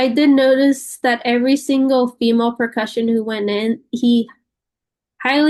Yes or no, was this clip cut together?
no